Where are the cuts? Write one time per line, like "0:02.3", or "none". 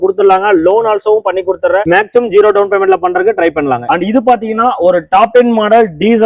0:03.8